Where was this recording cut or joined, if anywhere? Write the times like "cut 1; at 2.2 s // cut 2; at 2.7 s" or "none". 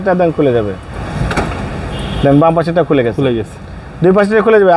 cut 1; at 1.0 s